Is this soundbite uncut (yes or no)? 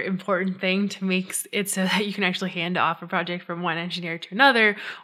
yes